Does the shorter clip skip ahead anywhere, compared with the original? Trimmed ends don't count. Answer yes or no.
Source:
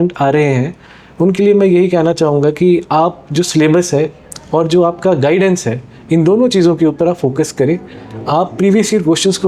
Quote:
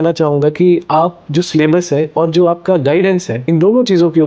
yes